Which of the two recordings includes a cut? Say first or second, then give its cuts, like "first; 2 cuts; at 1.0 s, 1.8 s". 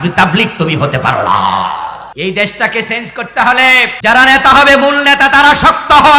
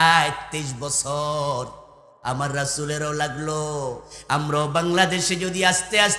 first; 2 cuts; at 2.0 s, 3.9 s